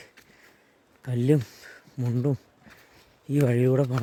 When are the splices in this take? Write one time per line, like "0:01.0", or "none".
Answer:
none